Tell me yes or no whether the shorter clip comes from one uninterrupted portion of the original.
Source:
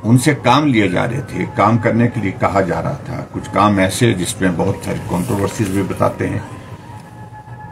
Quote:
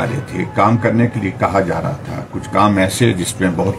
yes